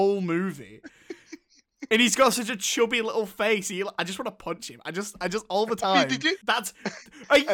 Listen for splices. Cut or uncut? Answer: cut